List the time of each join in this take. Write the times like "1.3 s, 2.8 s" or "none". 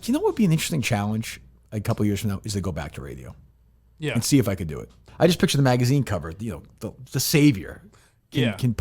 5.1 s